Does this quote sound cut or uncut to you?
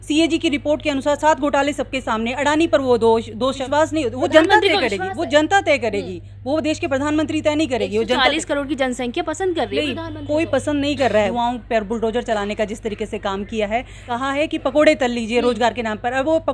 cut